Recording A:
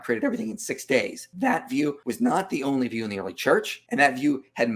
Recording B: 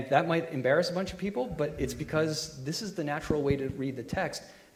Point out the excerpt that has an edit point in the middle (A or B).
A